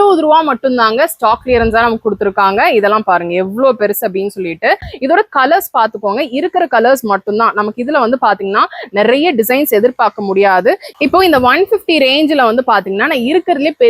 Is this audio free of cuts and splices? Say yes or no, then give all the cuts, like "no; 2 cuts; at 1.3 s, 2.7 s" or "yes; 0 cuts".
no; 2 cuts; at 4.9 s, 11.0 s